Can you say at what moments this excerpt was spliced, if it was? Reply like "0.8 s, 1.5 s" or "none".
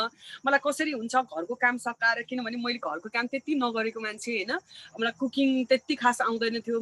none